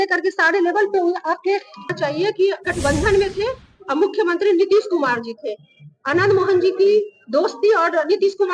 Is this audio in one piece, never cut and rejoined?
no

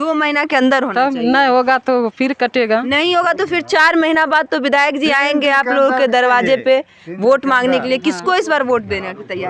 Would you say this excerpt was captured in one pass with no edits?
yes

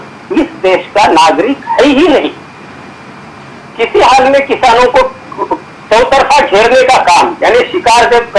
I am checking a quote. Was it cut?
no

